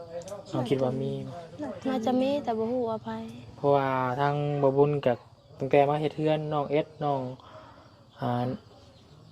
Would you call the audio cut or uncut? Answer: uncut